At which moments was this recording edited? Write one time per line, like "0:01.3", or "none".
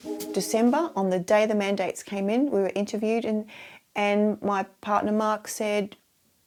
none